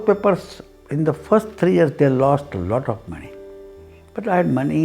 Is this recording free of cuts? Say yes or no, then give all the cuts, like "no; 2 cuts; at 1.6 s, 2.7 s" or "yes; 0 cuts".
yes; 0 cuts